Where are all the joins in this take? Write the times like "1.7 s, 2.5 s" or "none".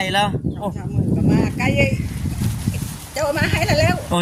none